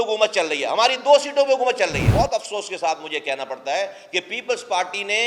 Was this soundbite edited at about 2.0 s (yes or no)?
yes